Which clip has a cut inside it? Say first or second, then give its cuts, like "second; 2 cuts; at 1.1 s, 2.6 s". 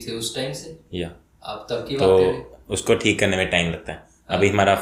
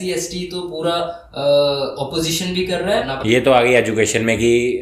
second; 1 cut; at 3.1 s